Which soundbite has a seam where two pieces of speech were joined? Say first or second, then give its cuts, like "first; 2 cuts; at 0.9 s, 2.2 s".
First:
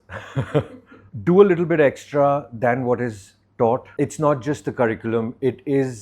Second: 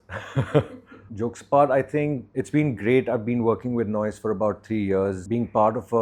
first; 2 cuts; at 1.0 s, 3.9 s